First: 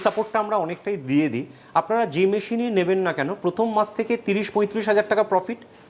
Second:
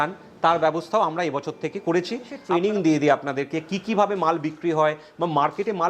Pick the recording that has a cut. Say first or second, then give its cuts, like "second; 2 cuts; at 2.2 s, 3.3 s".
second; 1 cut; at 2.3 s